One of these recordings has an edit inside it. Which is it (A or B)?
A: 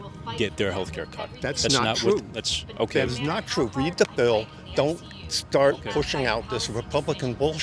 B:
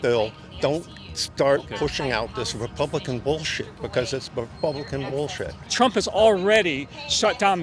B